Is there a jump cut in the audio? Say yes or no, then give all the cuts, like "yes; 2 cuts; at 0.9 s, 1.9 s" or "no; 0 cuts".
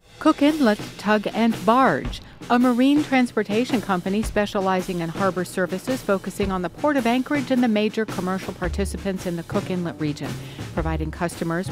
no; 0 cuts